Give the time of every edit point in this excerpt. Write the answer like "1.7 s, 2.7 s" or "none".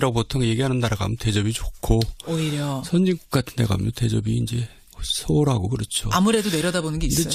none